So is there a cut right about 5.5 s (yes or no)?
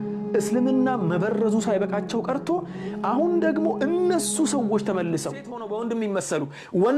yes